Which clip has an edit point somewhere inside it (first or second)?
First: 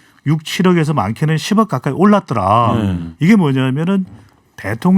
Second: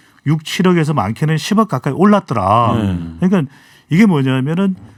first